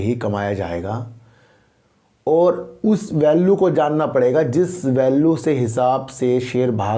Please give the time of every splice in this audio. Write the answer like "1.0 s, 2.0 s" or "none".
none